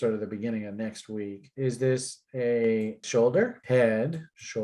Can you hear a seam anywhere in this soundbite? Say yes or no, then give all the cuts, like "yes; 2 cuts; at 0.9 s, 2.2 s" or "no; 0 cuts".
yes; 2 cuts; at 1.4 s, 3.0 s